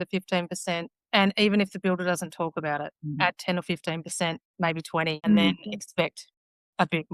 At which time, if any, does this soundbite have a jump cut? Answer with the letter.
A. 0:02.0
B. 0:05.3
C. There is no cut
B